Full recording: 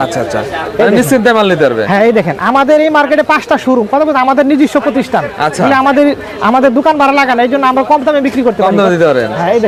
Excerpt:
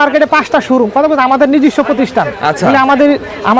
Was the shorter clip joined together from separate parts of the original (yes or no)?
no